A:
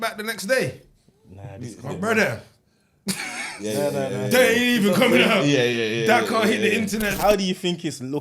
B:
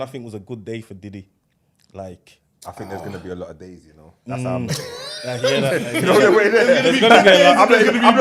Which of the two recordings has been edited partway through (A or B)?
A